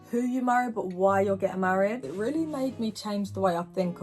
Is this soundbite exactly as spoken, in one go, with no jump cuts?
no; 1 cut; at 2.1 s

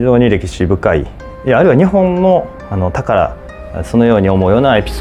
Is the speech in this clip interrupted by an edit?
no; 0 cuts

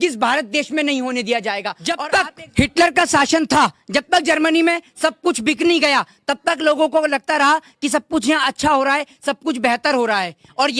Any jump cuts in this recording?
yes; 1 cut; at 1.7 s

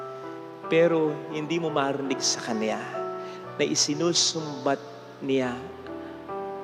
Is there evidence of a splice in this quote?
no; 0 cuts

